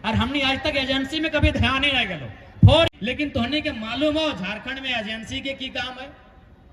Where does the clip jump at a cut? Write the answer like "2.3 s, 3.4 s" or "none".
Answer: 2.9 s